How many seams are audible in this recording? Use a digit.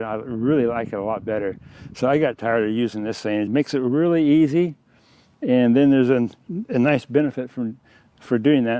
1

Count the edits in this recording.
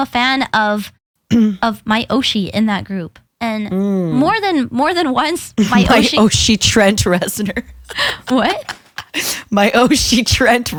0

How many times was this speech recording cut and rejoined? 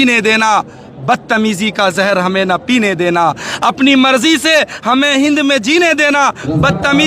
0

